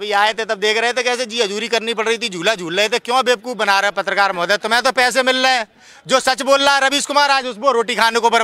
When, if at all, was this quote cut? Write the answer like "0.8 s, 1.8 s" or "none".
none